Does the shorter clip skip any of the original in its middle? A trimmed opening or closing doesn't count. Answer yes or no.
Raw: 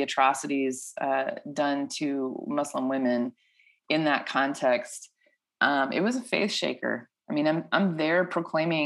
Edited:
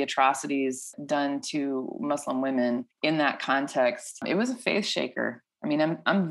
yes